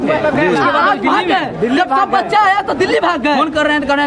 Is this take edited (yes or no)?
no